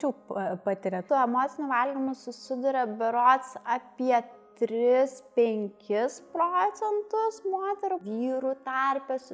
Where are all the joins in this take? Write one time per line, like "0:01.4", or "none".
0:01.0
0:08.0